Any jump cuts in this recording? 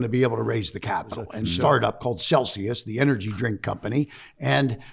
yes; 1 cut; at 1.5 s

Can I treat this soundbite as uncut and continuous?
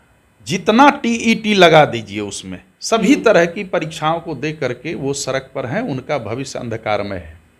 yes; 0 cuts

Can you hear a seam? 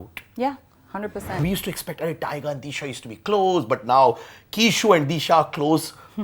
yes; 1 cut; at 1.4 s

